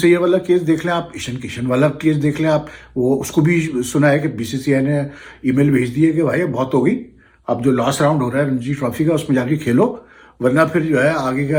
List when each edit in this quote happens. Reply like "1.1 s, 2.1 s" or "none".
none